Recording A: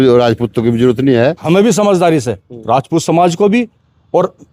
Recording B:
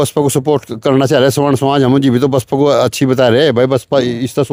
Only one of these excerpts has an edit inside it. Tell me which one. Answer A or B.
A